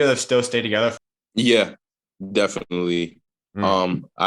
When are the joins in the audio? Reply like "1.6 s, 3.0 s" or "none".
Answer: 1.1 s